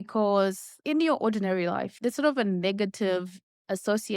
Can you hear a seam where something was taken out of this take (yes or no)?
no